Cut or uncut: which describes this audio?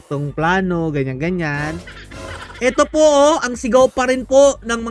uncut